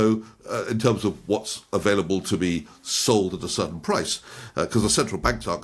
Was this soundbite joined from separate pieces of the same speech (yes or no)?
no